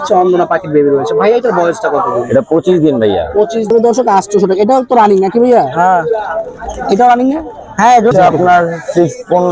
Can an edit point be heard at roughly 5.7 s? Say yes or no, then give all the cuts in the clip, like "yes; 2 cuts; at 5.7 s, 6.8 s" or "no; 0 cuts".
no; 2 cuts; at 3.7 s, 8.1 s